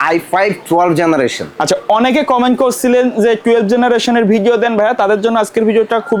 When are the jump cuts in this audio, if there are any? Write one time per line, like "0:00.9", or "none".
none